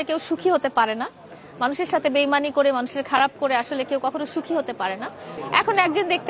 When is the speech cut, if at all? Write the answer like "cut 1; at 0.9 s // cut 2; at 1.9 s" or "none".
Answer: cut 1; at 5.3 s